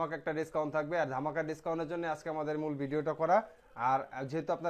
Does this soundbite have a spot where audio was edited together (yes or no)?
no